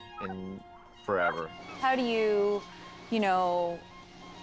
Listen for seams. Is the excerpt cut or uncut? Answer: cut